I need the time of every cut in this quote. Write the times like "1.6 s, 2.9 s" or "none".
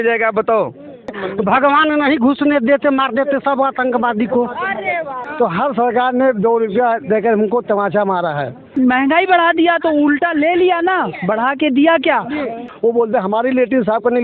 1.2 s, 5.2 s, 8.7 s, 12.7 s